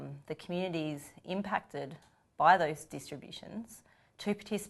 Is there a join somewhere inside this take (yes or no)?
yes